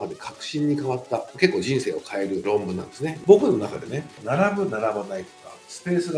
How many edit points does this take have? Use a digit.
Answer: 1